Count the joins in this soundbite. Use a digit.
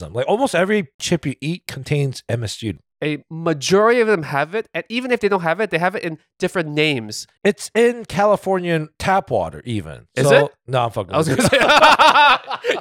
2